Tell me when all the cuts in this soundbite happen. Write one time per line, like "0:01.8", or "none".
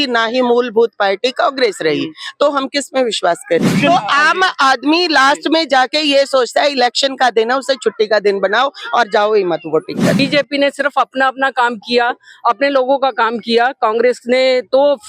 0:03.7
0:10.2